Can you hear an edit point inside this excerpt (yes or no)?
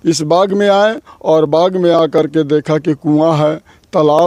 no